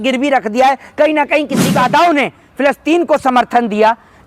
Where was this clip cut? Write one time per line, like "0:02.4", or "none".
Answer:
0:01.7